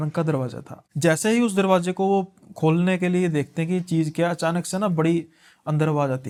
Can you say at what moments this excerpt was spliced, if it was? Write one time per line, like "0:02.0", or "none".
none